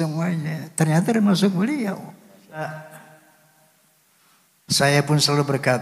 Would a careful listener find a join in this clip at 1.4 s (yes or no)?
no